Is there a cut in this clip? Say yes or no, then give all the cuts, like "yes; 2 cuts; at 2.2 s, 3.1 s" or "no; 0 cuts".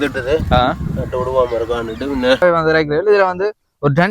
yes; 1 cut; at 2.4 s